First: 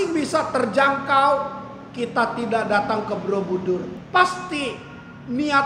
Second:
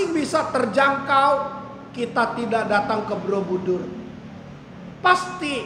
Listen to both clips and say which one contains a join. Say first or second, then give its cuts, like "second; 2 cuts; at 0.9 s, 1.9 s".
first; 1 cut; at 4.0 s